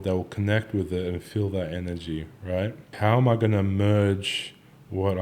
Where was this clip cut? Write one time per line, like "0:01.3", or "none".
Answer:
0:02.9